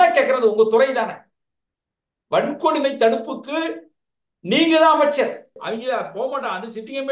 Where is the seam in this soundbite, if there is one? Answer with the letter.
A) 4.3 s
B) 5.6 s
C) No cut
B